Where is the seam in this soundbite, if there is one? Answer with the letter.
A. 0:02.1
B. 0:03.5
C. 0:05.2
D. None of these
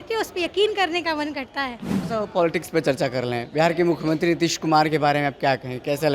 A